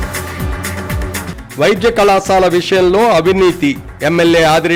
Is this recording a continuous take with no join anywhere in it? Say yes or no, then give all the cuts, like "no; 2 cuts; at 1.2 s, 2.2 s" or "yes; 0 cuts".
no; 1 cut; at 1.3 s